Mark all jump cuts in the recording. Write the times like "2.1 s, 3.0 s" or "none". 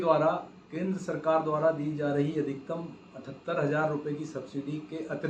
none